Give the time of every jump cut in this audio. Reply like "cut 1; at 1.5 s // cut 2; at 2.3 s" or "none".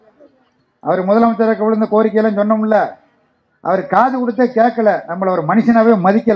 none